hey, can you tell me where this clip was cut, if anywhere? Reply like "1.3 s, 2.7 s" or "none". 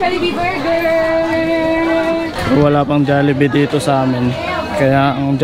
2.4 s

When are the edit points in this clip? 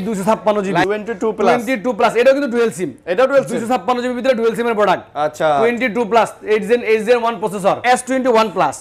0.8 s, 7.8 s

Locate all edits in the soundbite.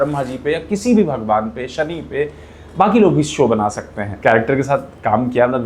4.0 s

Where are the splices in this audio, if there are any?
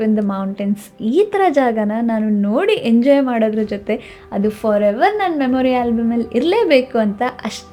none

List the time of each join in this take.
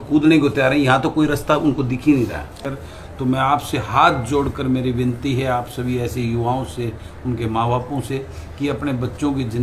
2.6 s

